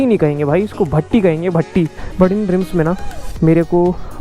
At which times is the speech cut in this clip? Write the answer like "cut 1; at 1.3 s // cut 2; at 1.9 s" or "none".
cut 1; at 1.9 s